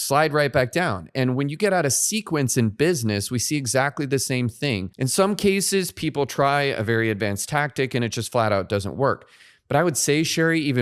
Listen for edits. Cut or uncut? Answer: cut